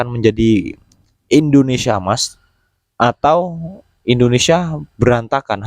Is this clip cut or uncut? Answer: uncut